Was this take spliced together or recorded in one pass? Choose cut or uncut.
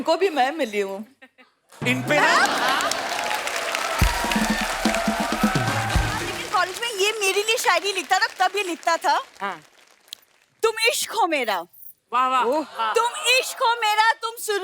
cut